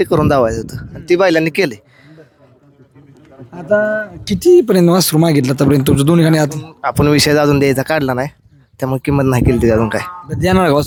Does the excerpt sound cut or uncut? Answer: uncut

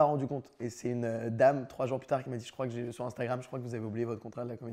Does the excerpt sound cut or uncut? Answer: uncut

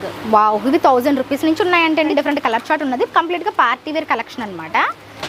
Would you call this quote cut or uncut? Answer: cut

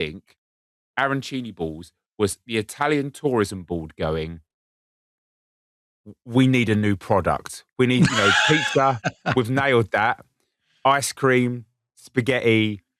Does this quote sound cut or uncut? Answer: uncut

